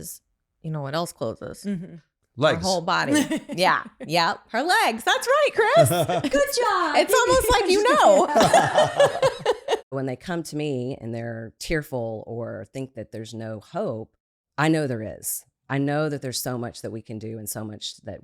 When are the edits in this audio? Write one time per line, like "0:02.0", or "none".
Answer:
0:09.9
0:11.5